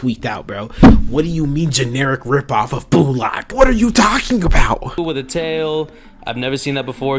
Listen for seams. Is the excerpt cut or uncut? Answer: cut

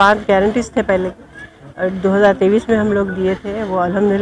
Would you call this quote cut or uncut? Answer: uncut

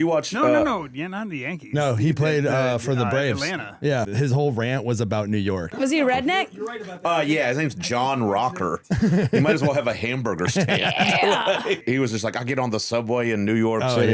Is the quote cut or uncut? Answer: cut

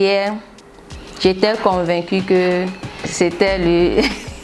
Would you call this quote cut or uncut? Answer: uncut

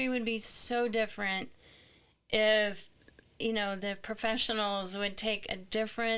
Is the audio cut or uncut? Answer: uncut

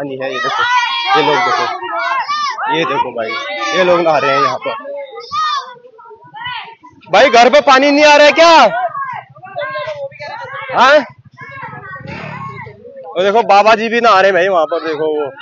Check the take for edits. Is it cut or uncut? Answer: uncut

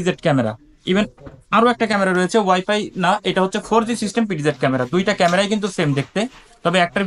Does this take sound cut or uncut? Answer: uncut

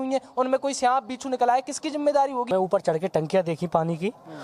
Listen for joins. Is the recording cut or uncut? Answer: cut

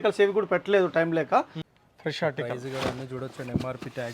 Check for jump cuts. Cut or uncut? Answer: cut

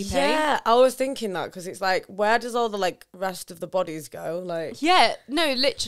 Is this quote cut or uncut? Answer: uncut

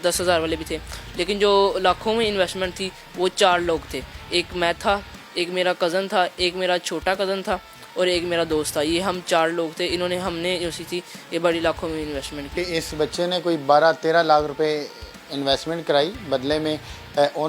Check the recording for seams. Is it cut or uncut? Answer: cut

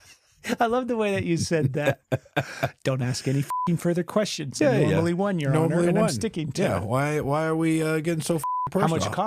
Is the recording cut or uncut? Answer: uncut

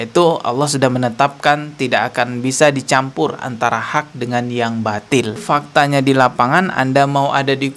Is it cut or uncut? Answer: cut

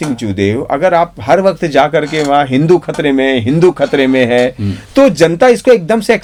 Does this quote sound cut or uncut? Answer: uncut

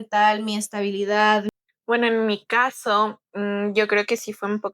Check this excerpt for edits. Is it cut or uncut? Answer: cut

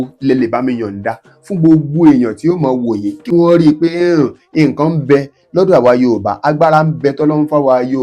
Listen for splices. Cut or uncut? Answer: cut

